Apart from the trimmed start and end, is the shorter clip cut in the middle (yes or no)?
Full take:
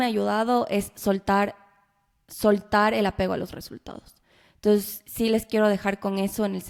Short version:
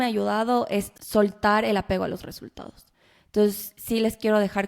yes